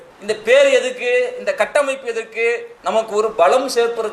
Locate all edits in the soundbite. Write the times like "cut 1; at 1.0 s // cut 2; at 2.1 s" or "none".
cut 1; at 2.7 s